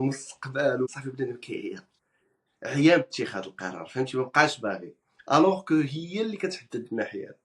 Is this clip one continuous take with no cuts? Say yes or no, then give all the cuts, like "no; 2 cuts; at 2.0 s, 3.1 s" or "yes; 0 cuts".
no; 1 cut; at 0.9 s